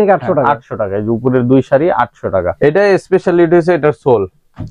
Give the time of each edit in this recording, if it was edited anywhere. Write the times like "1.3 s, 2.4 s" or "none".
2.5 s